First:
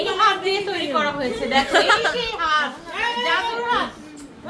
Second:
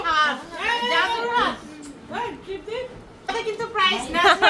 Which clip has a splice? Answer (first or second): second